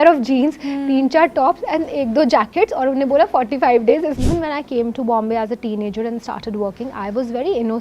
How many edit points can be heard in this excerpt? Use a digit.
1